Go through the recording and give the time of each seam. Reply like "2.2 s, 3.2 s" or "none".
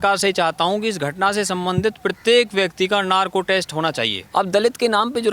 4.1 s